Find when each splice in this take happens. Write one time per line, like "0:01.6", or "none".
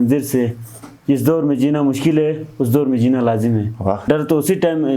0:04.0